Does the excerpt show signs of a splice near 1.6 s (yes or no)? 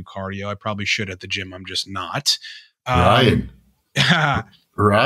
no